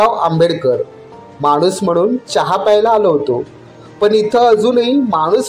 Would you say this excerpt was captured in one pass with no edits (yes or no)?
yes